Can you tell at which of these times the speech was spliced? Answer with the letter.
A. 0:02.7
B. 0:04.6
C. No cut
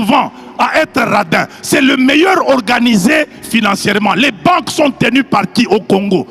C